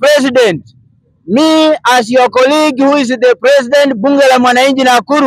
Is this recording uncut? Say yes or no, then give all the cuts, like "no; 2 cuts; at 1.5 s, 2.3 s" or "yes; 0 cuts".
yes; 0 cuts